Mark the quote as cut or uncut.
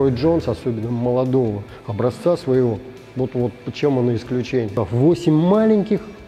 cut